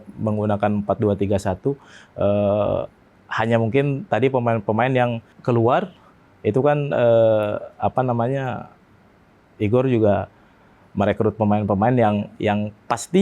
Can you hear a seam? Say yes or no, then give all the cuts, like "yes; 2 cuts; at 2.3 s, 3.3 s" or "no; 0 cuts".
yes; 1 cut; at 5.3 s